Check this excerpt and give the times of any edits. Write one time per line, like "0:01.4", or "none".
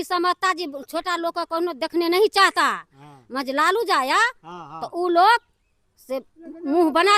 none